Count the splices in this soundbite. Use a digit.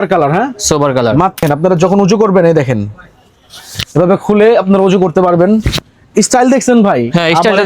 1